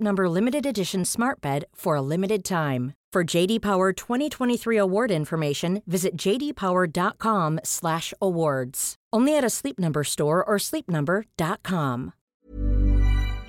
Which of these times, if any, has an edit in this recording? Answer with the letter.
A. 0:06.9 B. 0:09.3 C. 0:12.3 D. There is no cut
C